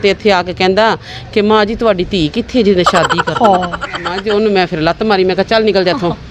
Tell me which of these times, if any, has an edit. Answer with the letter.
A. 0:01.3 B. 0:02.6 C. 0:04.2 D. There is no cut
C